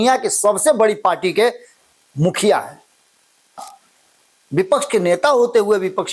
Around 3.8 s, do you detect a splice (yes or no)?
yes